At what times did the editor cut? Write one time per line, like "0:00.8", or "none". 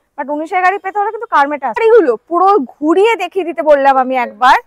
0:01.8